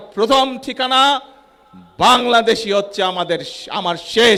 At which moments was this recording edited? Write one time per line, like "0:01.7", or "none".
none